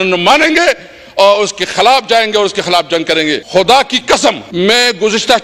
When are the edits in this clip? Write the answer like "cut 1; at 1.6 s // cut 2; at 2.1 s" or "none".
cut 1; at 3.4 s // cut 2; at 4.4 s

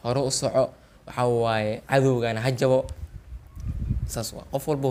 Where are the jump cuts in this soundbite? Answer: none

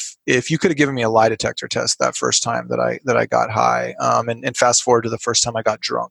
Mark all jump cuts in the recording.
none

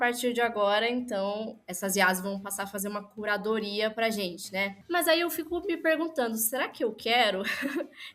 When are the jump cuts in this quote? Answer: cut 1; at 1.6 s // cut 2; at 4.8 s

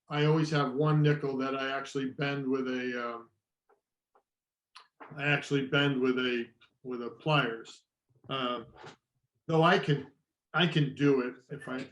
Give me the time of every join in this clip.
none

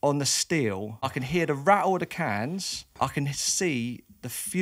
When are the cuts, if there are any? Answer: cut 1; at 1.0 s // cut 2; at 2.8 s

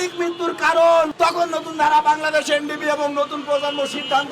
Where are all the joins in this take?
cut 1; at 1.1 s

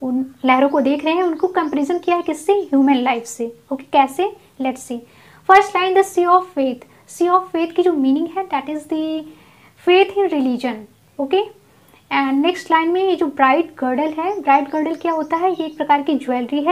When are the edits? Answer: none

